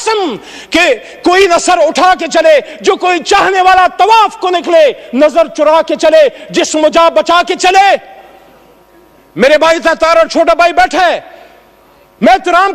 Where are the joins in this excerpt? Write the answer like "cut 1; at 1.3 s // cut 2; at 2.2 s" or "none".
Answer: none